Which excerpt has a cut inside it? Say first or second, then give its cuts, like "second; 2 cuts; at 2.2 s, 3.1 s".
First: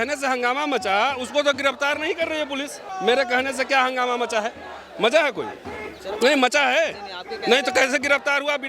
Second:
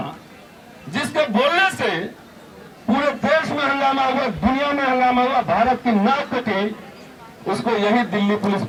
first; 1 cut; at 2.8 s